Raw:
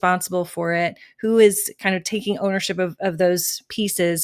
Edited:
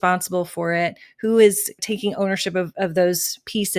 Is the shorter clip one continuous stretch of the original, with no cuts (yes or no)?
no